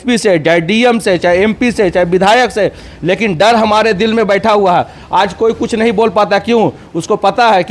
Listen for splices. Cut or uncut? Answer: uncut